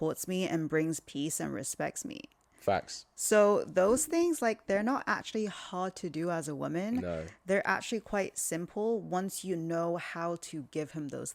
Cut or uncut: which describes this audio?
uncut